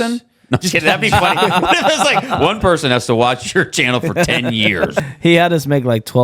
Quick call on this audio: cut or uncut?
cut